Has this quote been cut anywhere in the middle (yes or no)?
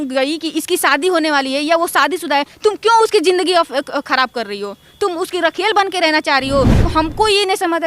yes